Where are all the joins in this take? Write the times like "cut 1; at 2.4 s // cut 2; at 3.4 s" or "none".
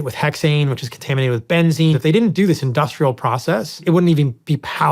cut 1; at 2.0 s // cut 2; at 3.8 s